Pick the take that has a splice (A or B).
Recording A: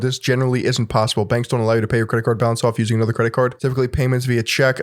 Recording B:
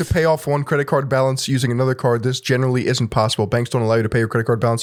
A